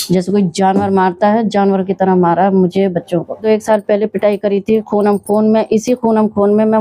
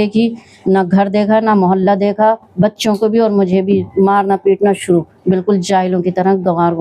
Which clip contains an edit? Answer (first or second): first